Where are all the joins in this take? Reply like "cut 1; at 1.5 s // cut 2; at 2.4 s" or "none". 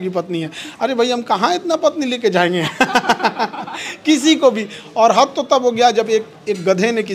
none